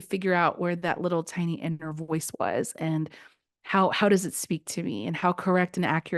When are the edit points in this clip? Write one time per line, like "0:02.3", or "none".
none

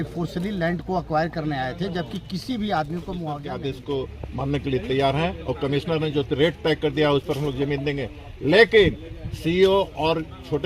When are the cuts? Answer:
0:03.5

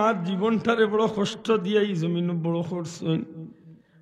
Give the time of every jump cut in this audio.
none

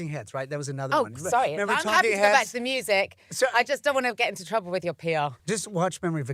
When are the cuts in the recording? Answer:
0:05.4

